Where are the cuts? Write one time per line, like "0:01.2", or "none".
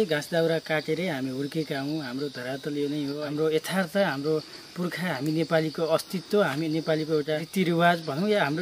0:03.2
0:07.5